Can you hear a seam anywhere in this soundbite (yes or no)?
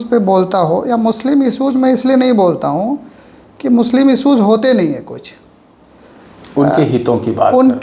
no